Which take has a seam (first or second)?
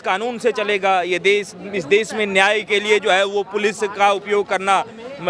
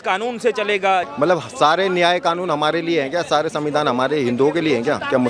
second